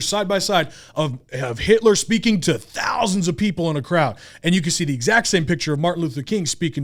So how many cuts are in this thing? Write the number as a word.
zero